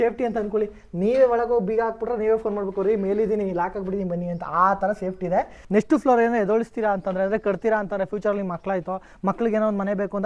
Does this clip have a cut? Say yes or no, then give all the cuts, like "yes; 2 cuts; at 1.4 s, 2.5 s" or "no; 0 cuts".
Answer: yes; 1 cut; at 5.6 s